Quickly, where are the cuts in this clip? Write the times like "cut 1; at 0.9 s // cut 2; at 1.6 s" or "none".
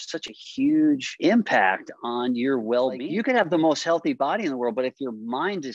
cut 1; at 1.1 s // cut 2; at 3.0 s